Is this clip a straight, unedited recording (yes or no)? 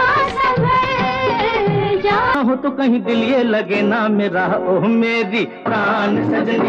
no